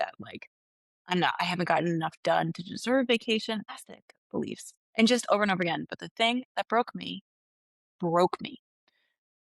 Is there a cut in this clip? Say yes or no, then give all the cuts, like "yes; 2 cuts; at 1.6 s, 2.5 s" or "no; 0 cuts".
yes; 2 cuts; at 3.7 s, 4.8 s